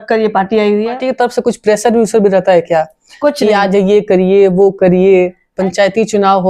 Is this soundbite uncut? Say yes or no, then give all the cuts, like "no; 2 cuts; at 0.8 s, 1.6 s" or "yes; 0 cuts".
no; 2 cuts; at 1.0 s, 5.4 s